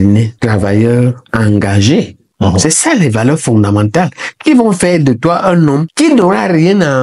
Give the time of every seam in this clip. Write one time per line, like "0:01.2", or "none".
0:02.2